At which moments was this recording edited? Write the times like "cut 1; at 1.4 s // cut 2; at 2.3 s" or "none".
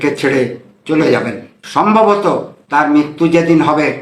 cut 1; at 1.5 s